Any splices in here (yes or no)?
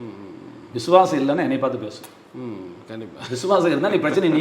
no